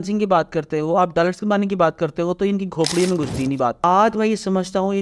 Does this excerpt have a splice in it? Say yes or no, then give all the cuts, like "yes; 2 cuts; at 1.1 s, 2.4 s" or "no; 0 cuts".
yes; 1 cut; at 3.8 s